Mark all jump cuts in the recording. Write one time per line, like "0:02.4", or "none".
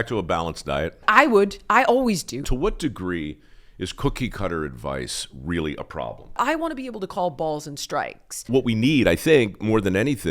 0:01.0
0:02.4
0:06.4
0:08.5